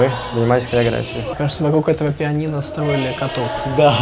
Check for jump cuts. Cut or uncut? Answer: cut